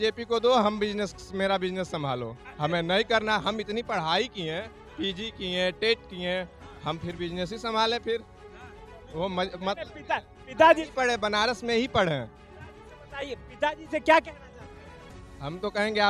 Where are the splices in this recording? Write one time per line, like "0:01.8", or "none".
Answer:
none

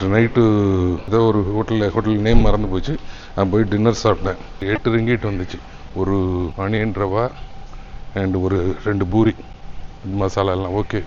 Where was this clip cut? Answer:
0:01.0
0:04.6
0:06.5

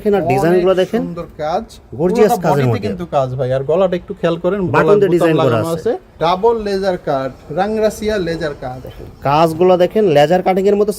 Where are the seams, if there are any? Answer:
0:06.1

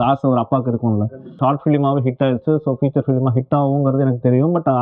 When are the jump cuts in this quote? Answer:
0:01.4

